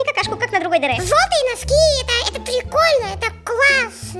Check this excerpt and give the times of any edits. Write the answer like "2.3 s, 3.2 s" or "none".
1.0 s

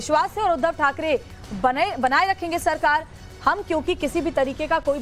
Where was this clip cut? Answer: 4.0 s

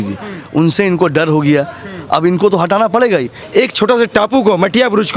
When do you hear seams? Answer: 3.4 s

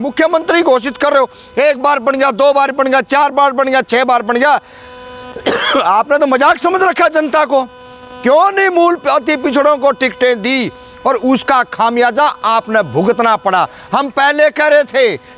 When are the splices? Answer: none

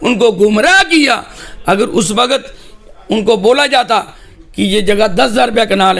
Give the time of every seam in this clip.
none

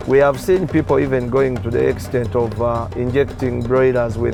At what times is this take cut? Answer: none

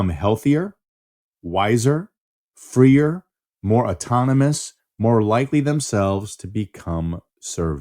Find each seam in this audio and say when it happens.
none

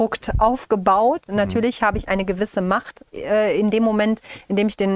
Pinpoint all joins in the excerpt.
1.3 s

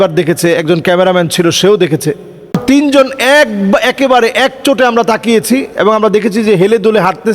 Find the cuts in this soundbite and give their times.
2.6 s

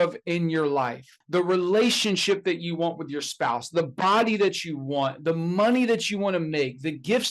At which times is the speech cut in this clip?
1.2 s

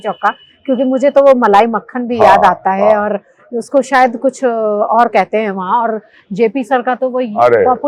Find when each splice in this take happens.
none

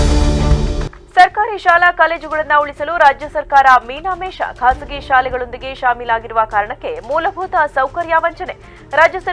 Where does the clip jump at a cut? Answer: 0.9 s

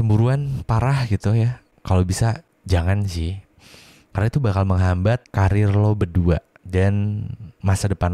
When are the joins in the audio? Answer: 1.7 s, 2.5 s, 5.3 s, 6.5 s

